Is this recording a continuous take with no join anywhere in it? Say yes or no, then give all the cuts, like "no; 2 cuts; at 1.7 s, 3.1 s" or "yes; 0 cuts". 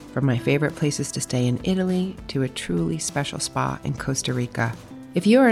yes; 0 cuts